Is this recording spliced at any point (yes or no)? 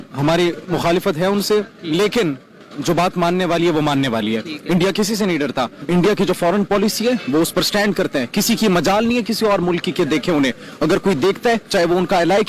yes